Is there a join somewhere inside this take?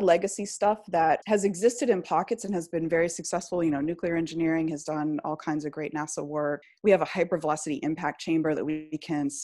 yes; 2 cuts; at 1.2 s, 6.7 s

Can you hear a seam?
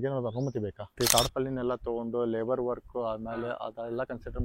yes; 1 cut; at 0.9 s

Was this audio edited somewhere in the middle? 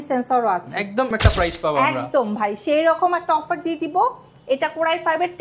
yes; 1 cut; at 1.1 s

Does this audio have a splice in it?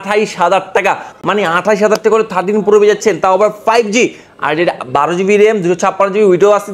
no; 0 cuts

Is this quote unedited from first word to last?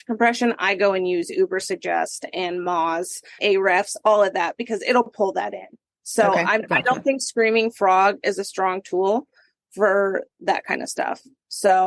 no; 2 cuts; at 3.4 s, 10.4 s

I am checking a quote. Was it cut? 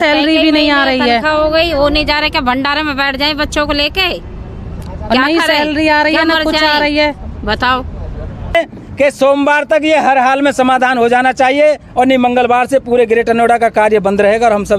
yes; 1 cut; at 8.5 s

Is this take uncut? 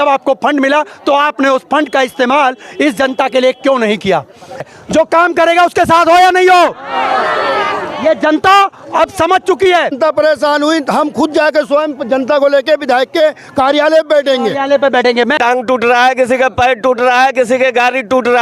no; 3 cuts; at 4.6 s, 9.9 s, 15.3 s

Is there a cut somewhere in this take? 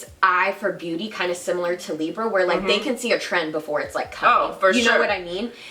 no; 0 cuts

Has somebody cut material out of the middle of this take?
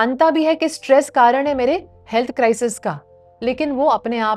no; 0 cuts

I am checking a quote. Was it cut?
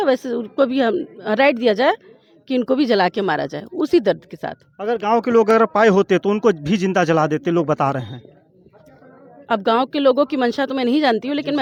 no; 0 cuts

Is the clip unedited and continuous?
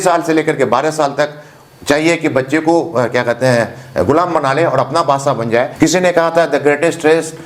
no; 1 cut; at 5.7 s

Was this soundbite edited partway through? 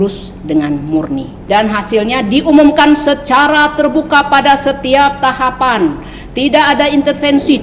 yes; 1 cut; at 1.3 s

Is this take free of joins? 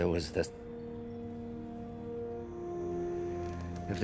no; 1 cut; at 2.6 s

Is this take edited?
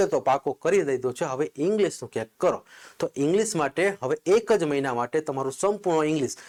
no; 0 cuts

